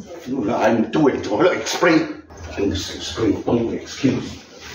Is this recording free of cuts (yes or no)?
no